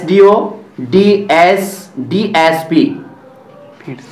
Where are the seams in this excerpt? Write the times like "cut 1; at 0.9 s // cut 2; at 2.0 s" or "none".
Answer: none